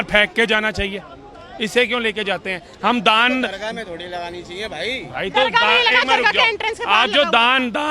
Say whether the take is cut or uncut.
uncut